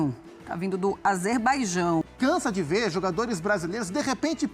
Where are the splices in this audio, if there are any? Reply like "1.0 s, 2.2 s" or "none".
2.0 s